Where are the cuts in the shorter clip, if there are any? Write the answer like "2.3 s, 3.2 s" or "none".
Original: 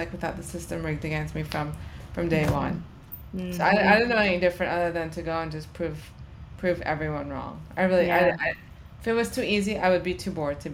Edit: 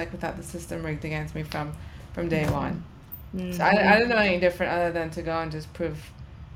none